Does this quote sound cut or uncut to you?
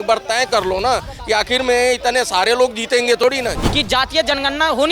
cut